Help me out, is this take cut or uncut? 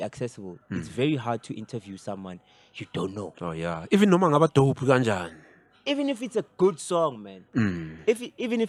uncut